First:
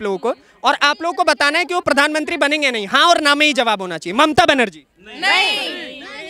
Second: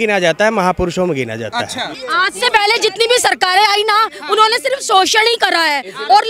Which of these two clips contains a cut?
second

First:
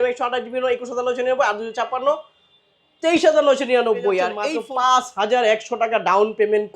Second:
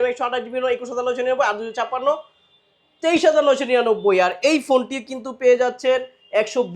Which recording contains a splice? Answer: first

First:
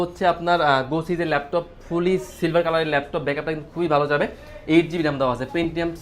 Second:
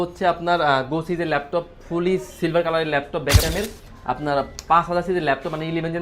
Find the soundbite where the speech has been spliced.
second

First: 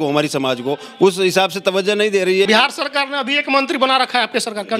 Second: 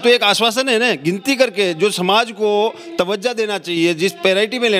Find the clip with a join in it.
first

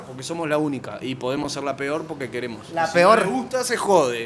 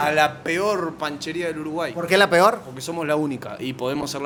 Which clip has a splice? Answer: first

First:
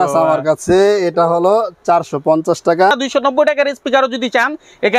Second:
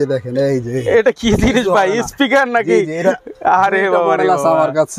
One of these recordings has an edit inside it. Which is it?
first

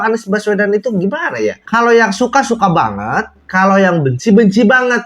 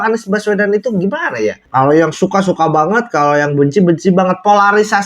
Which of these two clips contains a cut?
second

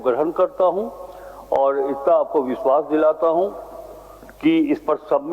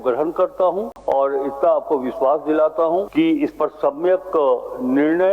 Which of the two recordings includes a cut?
second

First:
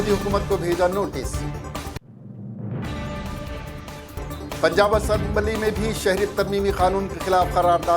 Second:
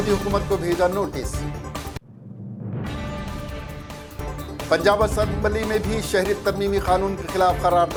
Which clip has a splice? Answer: first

